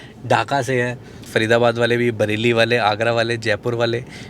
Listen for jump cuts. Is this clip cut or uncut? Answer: cut